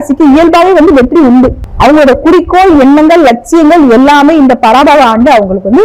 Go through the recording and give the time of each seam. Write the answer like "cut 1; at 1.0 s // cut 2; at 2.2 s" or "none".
cut 1; at 1.6 s